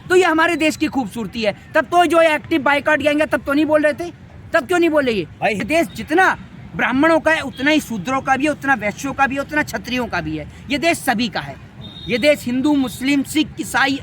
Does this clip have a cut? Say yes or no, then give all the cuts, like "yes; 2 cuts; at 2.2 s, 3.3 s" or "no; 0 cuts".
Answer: yes; 1 cut; at 5.6 s